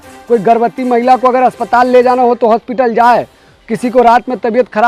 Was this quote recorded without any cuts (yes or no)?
yes